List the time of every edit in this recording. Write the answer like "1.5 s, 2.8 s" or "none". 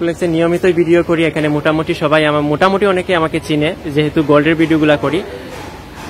none